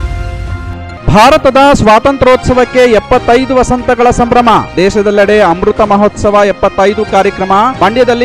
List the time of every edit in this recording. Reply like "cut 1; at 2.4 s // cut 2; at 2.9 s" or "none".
cut 1; at 0.9 s